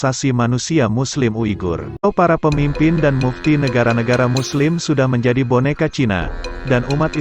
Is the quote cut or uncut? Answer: cut